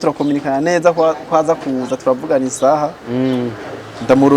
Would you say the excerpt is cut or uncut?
uncut